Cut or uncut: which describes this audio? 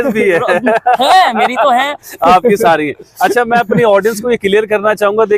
uncut